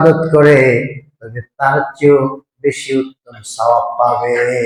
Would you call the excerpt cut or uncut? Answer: uncut